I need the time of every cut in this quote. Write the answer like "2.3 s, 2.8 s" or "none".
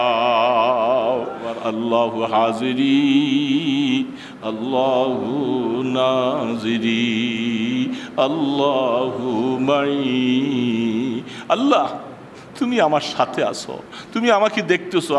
1.6 s